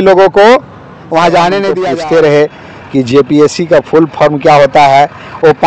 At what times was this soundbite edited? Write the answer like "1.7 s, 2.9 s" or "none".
1.8 s